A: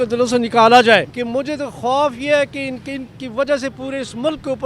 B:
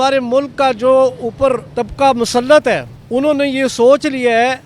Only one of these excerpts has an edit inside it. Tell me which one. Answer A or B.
A